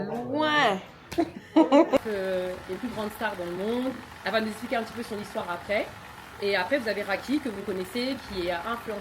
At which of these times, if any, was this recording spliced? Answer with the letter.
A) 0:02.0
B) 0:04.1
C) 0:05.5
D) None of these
A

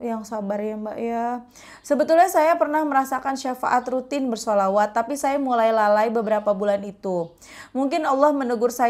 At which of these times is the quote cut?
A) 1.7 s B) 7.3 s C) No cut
C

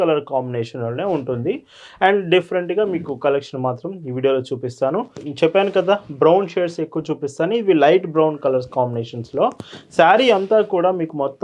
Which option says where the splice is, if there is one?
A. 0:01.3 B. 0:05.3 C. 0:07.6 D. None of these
B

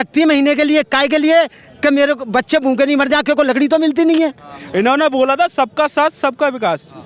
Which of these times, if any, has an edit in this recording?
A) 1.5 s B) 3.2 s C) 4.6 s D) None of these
C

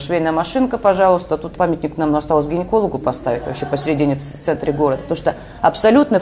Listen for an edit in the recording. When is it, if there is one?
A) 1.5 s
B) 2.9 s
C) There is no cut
A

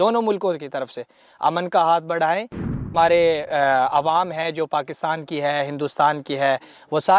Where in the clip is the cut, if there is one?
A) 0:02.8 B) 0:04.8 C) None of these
A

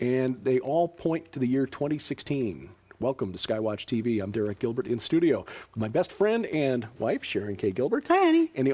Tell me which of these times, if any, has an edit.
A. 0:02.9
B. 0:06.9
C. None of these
A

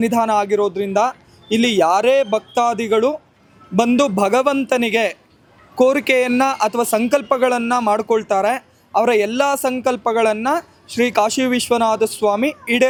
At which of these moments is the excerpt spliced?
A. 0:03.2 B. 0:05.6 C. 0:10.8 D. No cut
D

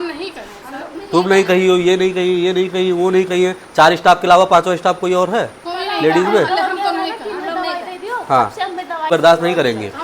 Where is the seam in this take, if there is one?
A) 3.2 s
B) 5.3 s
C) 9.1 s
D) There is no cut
C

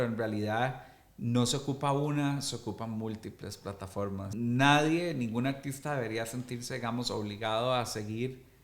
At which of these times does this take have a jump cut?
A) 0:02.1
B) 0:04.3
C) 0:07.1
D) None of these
B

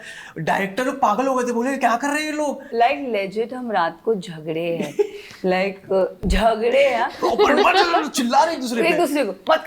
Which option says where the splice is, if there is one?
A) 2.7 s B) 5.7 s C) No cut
A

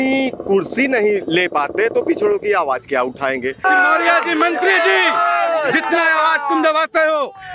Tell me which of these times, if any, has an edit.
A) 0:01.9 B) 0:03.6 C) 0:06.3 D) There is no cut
B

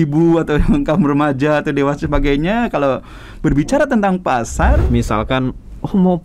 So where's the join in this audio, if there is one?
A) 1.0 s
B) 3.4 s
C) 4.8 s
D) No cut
C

